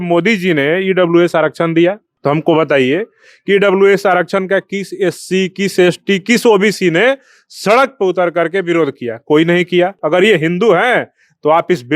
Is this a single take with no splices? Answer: no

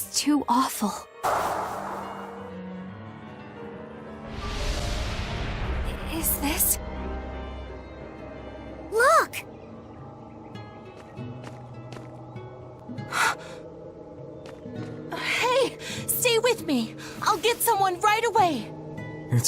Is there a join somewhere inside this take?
yes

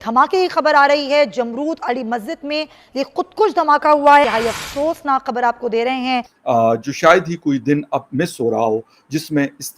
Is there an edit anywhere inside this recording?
yes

